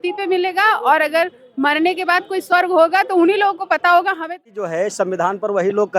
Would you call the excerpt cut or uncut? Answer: cut